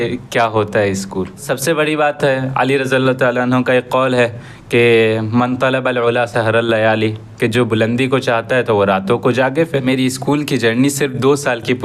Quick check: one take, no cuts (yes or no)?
no